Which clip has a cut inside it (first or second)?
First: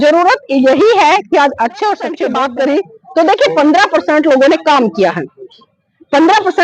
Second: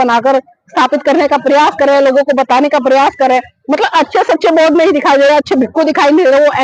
first